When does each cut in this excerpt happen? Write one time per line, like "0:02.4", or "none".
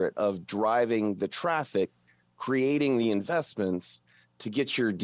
none